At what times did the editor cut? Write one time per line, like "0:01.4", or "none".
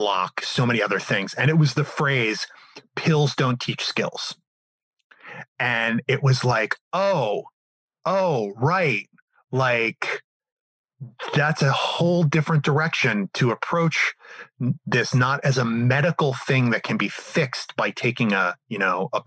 none